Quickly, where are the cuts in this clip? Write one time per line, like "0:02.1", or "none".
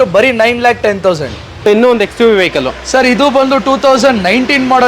0:01.5